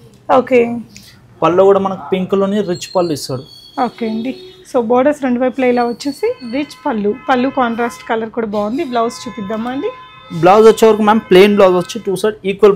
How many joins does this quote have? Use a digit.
0